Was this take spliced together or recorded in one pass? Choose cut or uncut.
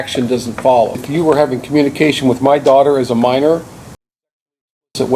cut